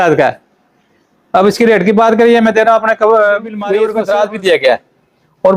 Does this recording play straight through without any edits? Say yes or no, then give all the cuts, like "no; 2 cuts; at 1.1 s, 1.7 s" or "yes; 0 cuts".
no; 1 cut; at 3.8 s